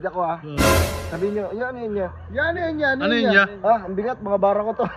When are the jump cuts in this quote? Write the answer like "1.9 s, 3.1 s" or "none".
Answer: none